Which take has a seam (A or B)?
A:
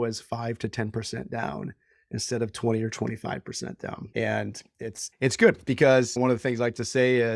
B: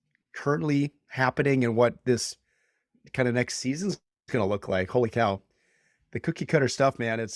A